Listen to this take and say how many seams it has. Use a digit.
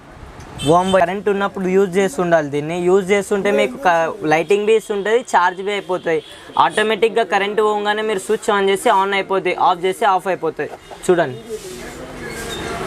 1